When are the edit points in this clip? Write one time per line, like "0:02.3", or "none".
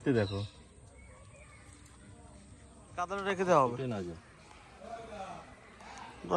0:03.1

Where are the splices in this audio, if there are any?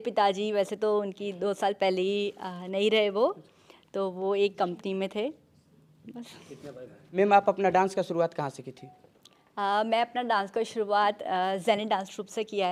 none

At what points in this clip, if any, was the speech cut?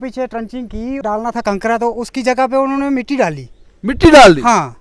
0:01.0

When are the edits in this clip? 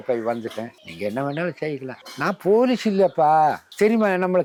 none

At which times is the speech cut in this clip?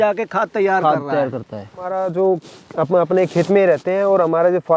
0:01.8

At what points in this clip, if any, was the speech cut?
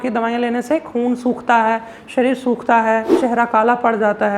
0:03.2

